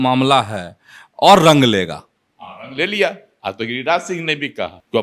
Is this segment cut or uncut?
uncut